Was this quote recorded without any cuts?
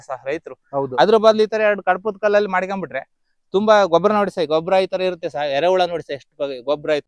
yes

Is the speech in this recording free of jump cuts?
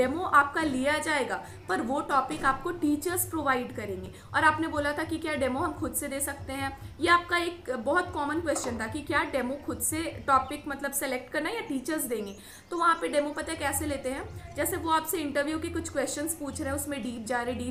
yes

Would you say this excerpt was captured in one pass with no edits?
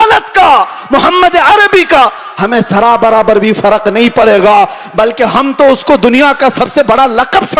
yes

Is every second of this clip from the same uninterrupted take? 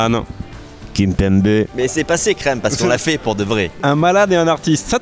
no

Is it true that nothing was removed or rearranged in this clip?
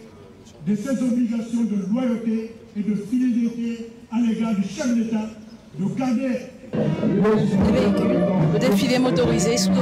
no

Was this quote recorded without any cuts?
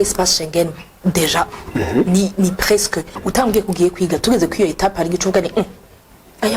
no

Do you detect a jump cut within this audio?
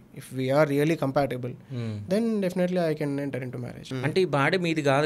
yes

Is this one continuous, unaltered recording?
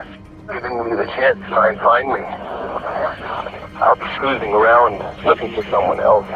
yes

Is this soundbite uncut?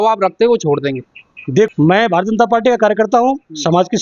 no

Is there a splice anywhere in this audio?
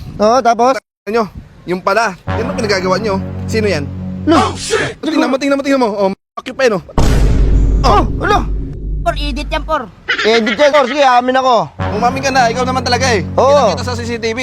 yes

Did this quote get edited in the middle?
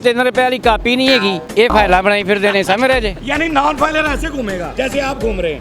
yes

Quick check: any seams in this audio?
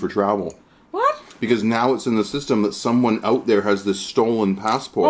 no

